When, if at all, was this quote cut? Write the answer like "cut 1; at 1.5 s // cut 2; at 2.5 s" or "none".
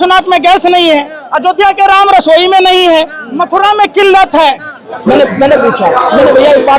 cut 1; at 4.7 s